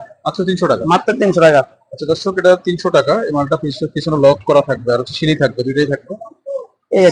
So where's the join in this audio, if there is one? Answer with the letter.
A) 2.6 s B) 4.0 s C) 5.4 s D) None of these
D